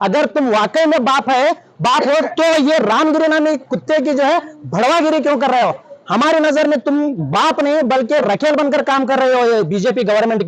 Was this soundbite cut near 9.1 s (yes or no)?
no